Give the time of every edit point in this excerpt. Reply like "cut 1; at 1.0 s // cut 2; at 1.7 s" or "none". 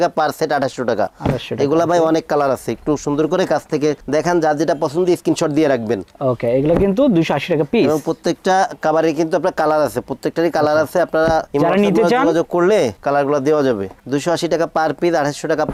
none